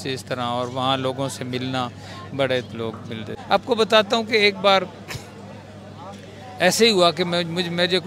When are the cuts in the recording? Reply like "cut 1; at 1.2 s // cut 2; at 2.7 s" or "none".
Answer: cut 1; at 3.3 s